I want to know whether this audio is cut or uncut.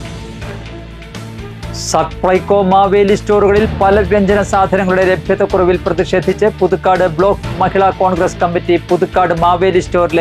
cut